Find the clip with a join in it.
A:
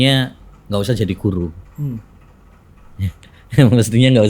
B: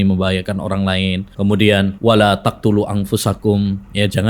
B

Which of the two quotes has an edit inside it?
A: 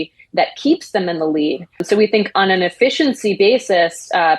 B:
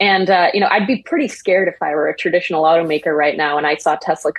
A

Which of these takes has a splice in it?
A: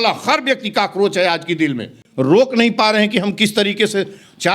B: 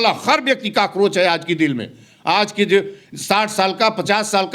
A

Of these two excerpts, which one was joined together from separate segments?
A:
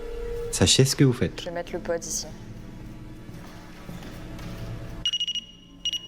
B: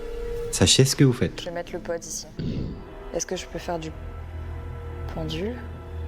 B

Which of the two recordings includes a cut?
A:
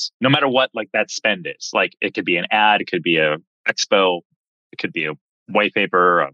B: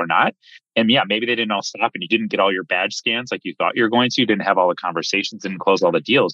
A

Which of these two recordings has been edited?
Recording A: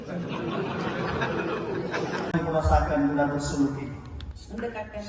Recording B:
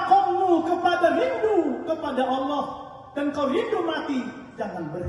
A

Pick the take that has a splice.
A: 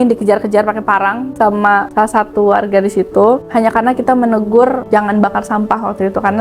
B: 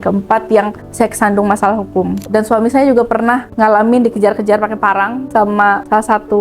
B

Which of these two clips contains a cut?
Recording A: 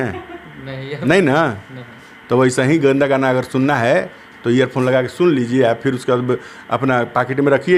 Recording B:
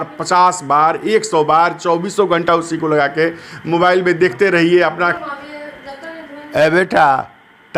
B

